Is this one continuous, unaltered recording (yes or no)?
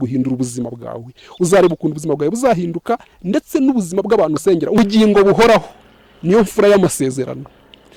no